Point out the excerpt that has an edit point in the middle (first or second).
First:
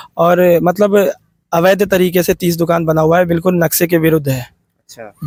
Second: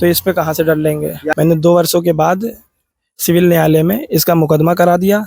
second